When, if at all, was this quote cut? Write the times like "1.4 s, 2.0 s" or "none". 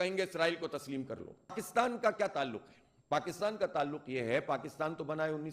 1.6 s